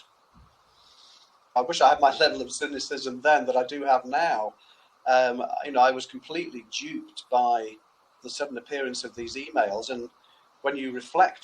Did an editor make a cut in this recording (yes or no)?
yes